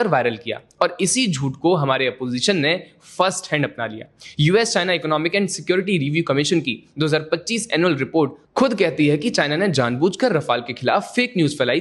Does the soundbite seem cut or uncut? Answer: uncut